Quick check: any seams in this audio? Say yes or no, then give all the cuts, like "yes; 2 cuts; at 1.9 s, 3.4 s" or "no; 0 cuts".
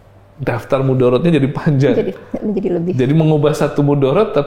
no; 0 cuts